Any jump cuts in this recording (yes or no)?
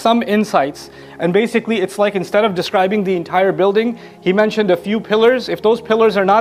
no